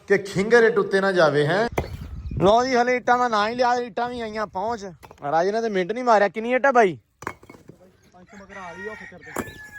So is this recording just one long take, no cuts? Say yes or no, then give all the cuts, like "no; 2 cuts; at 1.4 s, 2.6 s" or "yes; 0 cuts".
no; 1 cut; at 1.8 s